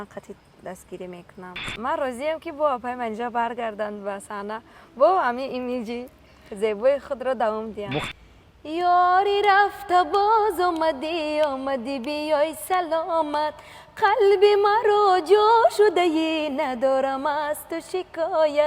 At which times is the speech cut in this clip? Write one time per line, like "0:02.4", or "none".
0:01.6
0:08.2